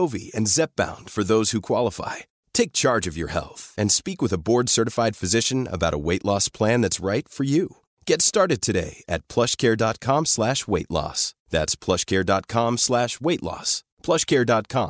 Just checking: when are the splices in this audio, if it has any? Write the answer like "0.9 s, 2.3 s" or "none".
none